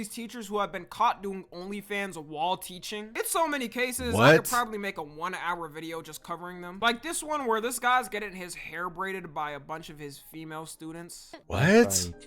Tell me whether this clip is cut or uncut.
cut